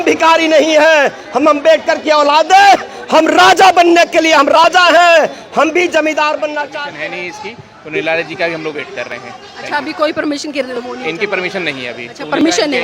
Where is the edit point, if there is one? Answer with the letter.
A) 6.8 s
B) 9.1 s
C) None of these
A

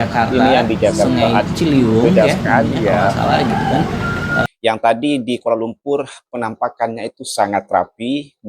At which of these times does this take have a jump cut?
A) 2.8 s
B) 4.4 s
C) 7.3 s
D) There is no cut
B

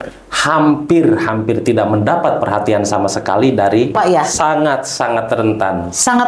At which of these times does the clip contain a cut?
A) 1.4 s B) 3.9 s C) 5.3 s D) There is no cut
B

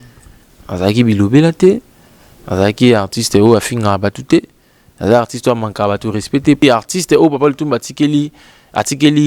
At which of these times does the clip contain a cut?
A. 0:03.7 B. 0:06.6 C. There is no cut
B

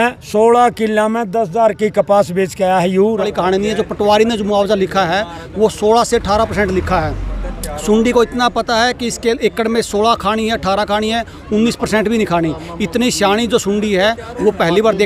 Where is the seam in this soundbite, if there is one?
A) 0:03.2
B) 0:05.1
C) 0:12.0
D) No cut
A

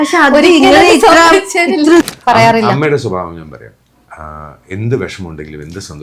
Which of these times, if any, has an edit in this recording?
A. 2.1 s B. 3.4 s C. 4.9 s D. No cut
A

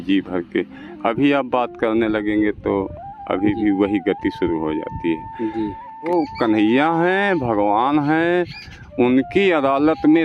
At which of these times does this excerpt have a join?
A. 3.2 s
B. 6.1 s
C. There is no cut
B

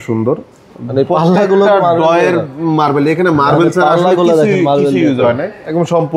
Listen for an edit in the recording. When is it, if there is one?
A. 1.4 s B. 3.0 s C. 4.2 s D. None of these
D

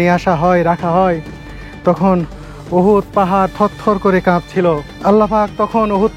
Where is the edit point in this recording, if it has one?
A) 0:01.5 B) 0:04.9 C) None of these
B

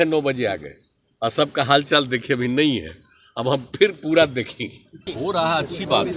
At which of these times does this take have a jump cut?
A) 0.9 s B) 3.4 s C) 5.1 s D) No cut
C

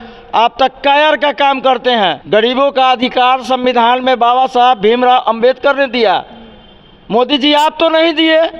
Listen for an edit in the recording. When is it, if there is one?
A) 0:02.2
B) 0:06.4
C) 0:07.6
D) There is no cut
A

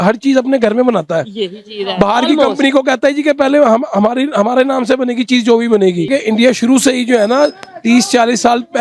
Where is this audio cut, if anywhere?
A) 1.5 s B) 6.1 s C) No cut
B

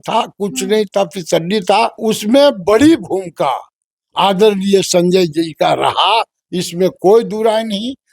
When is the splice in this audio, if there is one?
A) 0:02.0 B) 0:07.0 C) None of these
A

